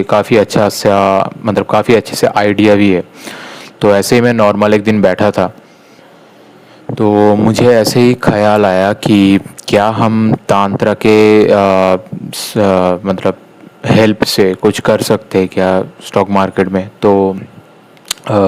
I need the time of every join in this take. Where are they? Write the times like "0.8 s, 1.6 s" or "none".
none